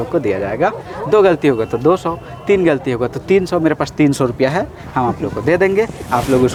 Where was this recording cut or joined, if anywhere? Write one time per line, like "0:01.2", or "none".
none